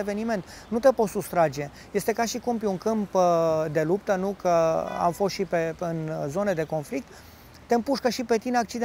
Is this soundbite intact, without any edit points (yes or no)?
yes